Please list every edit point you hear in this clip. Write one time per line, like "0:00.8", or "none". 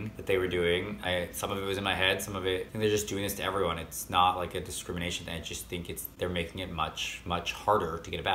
0:01.0
0:02.7